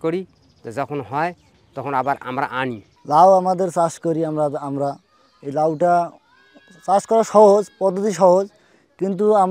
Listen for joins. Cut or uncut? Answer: cut